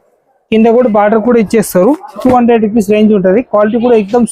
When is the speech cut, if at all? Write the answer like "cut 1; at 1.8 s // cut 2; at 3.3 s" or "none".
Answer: cut 1; at 2.2 s

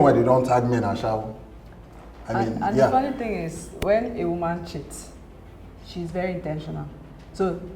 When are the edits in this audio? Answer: none

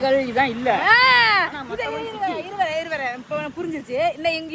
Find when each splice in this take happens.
none

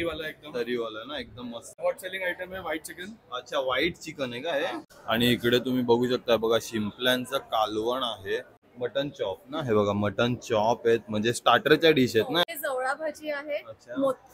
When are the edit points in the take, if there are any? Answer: cut 1; at 1.8 s // cut 2; at 4.9 s // cut 3; at 8.6 s // cut 4; at 12.4 s

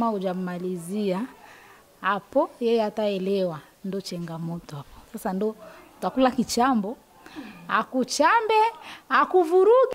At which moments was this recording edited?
none

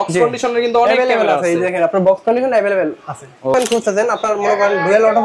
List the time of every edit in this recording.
cut 1; at 3.5 s

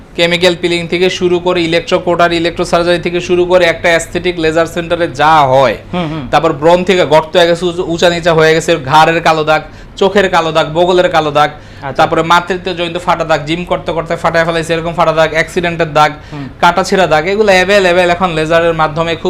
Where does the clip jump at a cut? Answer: none

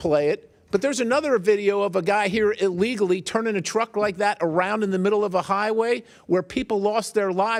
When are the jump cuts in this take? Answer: none

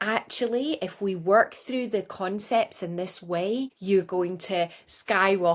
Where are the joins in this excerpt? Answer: cut 1; at 3.8 s

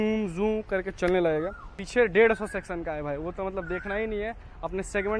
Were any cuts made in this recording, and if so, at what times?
cut 1; at 1.8 s

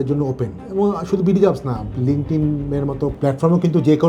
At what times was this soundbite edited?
cut 1; at 3.1 s

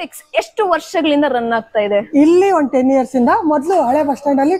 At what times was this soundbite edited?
none

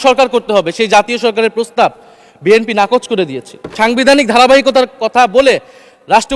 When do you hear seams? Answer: cut 1; at 3.7 s

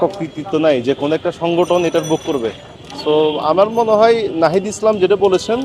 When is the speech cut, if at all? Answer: none

